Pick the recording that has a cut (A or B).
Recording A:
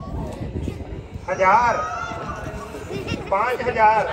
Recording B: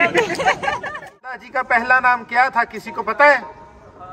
B